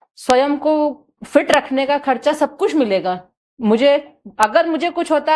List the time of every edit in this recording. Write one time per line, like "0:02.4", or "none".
none